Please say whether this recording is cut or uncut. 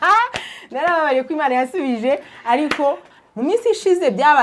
cut